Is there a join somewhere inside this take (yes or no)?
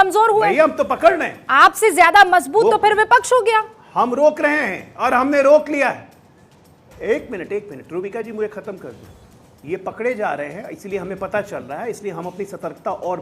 no